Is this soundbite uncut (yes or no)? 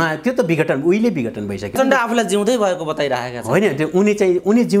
no